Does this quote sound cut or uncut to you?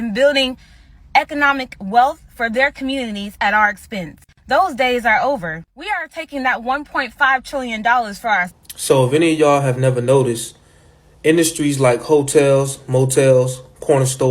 cut